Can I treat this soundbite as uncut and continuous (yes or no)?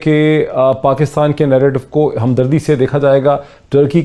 yes